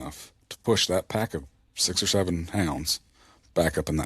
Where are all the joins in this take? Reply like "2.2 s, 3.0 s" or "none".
none